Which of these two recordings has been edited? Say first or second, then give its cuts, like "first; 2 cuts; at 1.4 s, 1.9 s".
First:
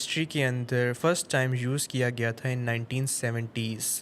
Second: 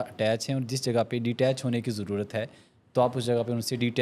first; 1 cut; at 1.0 s